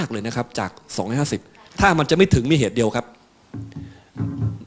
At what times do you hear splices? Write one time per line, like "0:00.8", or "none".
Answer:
0:01.6